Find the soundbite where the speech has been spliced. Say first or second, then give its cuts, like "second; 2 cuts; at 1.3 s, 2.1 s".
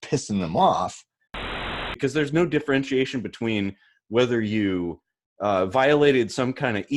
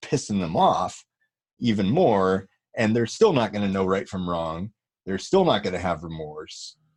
first; 1 cut; at 1.6 s